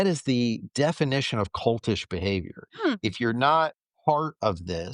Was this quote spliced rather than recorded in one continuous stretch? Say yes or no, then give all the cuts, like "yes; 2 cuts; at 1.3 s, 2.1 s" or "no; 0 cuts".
yes; 2 cuts; at 2.7 s, 3.8 s